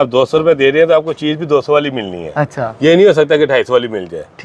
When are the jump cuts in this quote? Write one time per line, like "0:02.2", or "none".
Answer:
none